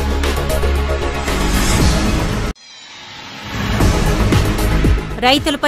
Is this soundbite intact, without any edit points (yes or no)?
yes